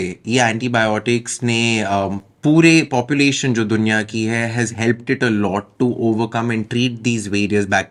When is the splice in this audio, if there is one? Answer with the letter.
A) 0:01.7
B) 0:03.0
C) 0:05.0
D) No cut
D